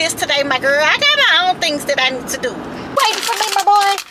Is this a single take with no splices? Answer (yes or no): no